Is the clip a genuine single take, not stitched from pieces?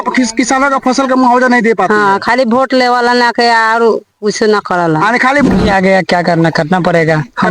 no; 1 cut; at 5.5 s

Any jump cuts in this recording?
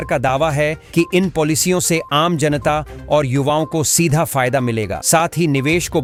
no; 0 cuts

